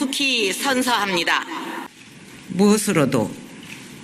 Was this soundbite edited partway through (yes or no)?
yes